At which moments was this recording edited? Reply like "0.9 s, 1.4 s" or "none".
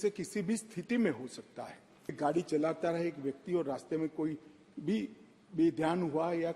2.2 s